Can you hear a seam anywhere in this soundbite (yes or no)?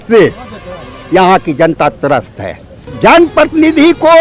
yes